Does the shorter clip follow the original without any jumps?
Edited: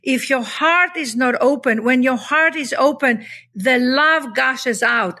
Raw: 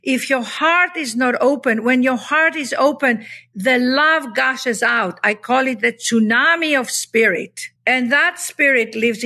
yes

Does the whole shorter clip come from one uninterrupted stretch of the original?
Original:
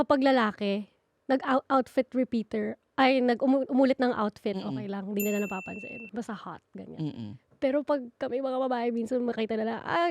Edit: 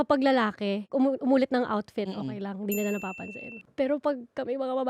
no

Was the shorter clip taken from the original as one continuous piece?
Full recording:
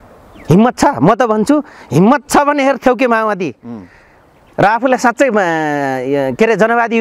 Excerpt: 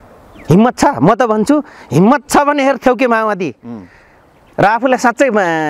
yes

